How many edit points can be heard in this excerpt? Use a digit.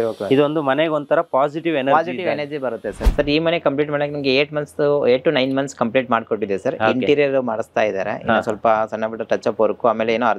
1